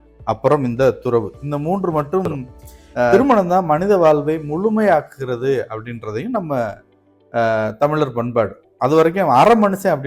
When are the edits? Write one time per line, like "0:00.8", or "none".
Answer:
0:03.1